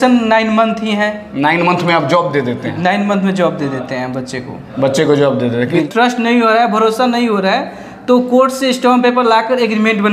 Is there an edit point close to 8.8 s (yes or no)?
no